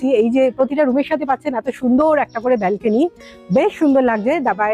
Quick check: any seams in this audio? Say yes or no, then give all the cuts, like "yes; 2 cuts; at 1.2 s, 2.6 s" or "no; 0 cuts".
no; 0 cuts